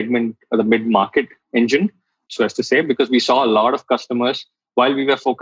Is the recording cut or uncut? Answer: cut